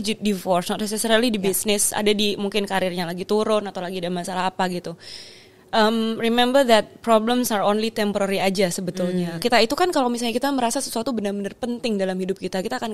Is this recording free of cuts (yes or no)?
no